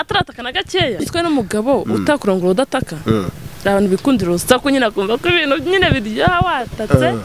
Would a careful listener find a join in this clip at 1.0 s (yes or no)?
yes